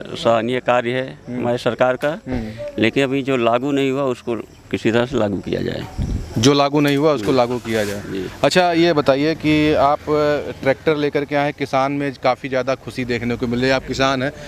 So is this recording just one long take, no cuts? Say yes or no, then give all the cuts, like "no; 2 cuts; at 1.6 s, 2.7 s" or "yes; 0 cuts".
yes; 0 cuts